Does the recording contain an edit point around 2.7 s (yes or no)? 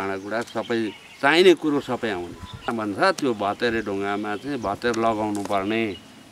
yes